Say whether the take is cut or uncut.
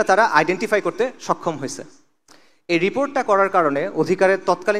uncut